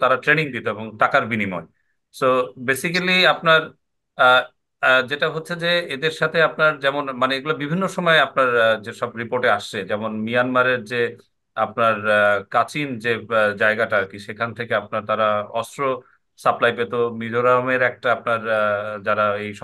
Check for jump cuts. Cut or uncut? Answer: uncut